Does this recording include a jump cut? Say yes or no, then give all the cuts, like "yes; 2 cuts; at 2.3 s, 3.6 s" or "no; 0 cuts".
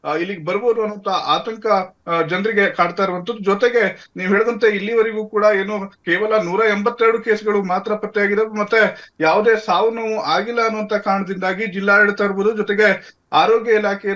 yes; 1 cut; at 13.1 s